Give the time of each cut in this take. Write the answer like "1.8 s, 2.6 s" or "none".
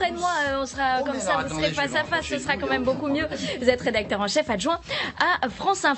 5.0 s